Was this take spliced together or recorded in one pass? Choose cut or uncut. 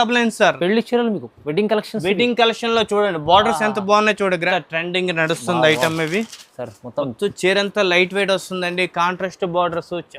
cut